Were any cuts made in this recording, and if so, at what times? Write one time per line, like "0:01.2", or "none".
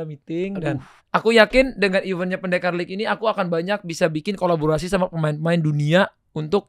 0:00.9